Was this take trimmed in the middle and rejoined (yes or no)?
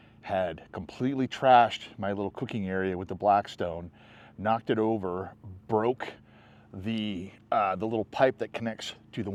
no